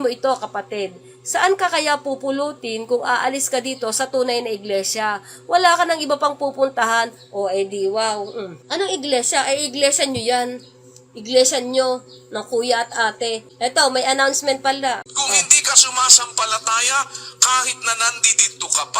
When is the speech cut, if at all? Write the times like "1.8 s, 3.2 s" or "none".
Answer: 8.6 s, 13.5 s, 15.0 s